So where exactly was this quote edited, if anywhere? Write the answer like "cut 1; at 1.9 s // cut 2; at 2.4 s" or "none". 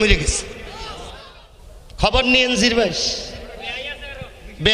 cut 1; at 1.3 s